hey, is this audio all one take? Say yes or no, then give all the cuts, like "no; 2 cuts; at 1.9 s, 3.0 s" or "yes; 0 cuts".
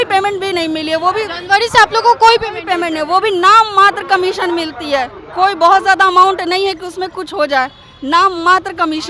yes; 0 cuts